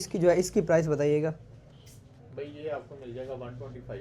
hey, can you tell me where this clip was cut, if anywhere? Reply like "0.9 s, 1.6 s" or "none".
none